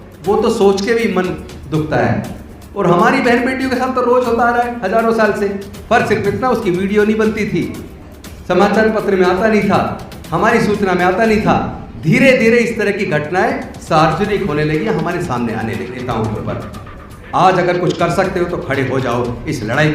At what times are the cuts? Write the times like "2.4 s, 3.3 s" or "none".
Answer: 16.0 s